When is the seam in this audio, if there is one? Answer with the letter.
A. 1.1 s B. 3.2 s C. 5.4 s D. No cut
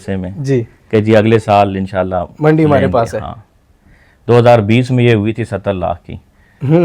D